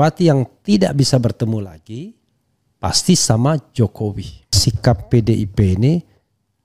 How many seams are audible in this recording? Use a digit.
1